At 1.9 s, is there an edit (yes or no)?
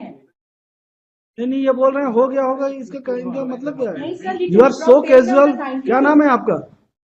no